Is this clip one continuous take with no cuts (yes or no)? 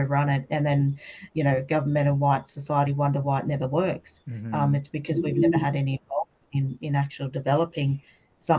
yes